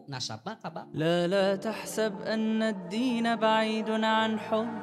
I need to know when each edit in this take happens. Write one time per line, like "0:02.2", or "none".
0:01.0